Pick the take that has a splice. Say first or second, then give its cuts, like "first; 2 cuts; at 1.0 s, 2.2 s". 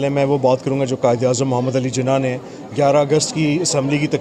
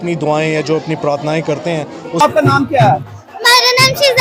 second; 1 cut; at 2.2 s